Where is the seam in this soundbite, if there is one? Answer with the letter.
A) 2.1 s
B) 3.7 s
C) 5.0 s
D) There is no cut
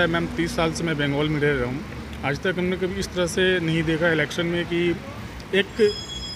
D